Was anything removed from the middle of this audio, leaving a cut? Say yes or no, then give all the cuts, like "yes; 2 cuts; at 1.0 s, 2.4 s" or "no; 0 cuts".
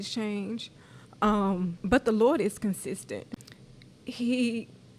yes; 2 cuts; at 1.8 s, 3.3 s